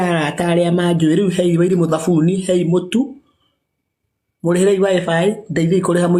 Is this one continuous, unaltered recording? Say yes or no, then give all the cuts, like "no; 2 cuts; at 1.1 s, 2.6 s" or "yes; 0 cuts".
yes; 0 cuts